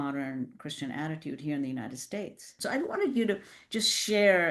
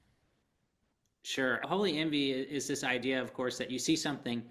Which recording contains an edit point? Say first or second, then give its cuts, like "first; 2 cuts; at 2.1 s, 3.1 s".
first; 1 cut; at 2.5 s